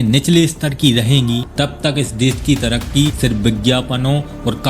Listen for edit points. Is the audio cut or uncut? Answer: cut